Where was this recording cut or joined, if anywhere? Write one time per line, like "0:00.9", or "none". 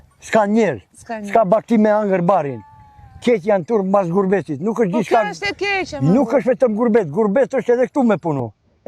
none